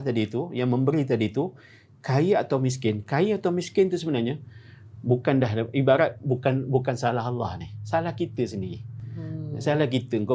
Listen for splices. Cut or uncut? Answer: uncut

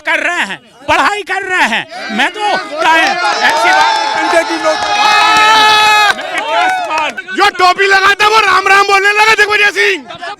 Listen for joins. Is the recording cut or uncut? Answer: cut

